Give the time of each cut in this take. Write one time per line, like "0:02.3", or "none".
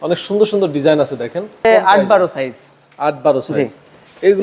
0:01.6